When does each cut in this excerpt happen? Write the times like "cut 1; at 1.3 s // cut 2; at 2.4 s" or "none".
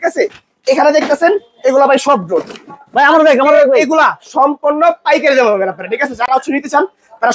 none